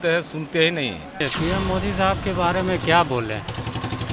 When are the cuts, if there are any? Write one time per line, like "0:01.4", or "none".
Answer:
0:01.1